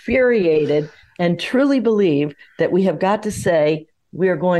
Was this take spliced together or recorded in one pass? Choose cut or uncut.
uncut